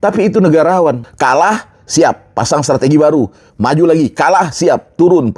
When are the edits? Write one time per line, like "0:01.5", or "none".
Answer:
0:01.1